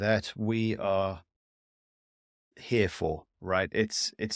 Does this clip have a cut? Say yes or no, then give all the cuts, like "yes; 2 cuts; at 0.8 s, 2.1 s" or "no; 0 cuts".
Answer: no; 0 cuts